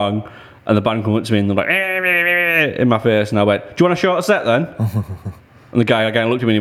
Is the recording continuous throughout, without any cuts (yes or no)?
yes